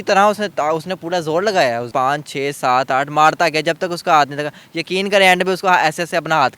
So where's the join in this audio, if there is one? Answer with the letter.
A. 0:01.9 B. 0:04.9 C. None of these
A